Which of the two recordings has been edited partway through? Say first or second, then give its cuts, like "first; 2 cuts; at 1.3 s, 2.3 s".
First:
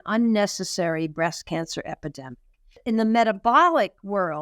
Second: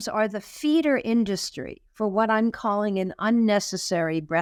first; 1 cut; at 2.7 s